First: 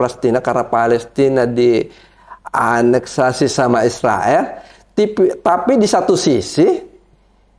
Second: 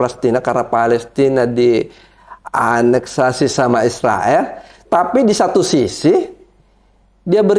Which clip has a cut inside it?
second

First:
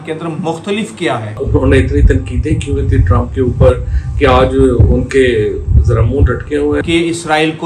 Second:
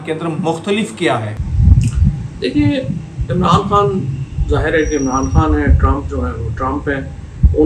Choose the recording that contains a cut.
first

